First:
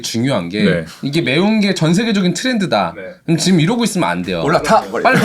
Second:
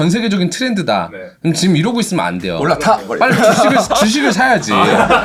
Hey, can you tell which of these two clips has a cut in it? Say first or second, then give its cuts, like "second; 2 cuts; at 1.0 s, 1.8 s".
first; 1 cut; at 0.9 s